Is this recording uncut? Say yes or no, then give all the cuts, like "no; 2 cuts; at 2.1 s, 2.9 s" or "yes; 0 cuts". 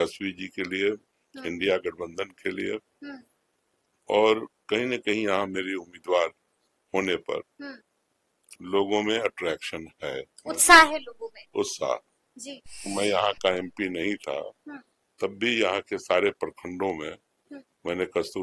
no; 1 cut; at 12.9 s